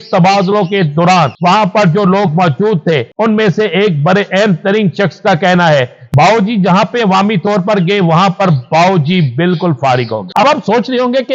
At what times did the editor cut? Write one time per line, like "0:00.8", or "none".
0:01.3
0:03.1
0:06.0
0:10.3